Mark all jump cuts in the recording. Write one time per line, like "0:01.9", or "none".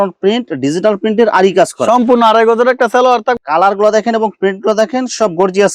0:03.4

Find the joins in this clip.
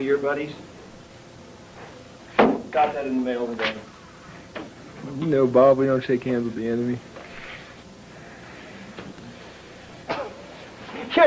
0:05.0

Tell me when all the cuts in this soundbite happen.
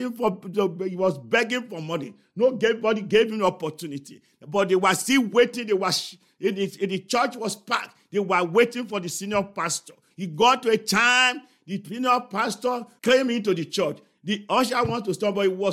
0:10.0
0:12.9
0:14.1

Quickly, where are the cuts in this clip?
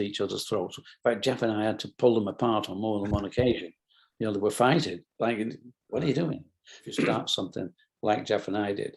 0:07.1

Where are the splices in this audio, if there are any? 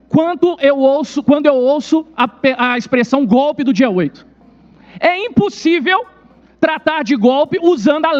none

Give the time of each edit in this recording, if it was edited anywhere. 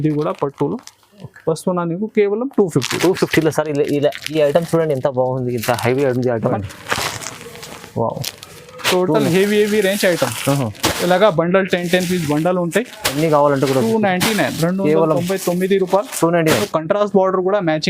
0:06.4
0:16.6

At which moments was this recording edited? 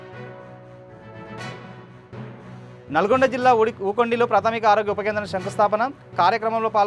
0:01.1

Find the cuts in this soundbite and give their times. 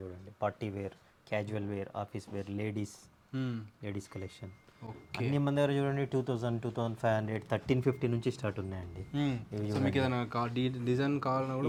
none

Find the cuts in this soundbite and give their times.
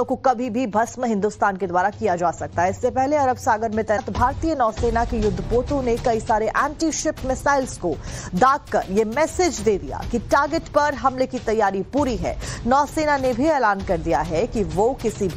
0:04.0

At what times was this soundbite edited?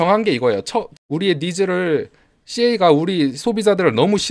0:00.9

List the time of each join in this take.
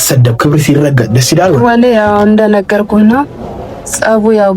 0:01.6

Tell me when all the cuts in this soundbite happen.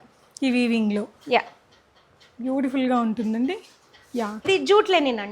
0:04.4

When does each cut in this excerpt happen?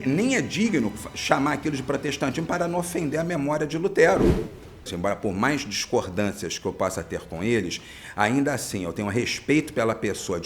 0:04.8

